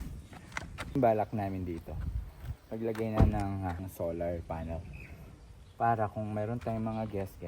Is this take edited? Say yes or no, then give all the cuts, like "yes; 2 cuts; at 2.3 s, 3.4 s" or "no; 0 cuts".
yes; 2 cuts; at 0.9 s, 3.8 s